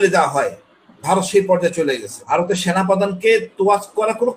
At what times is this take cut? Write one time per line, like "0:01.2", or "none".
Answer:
0:02.2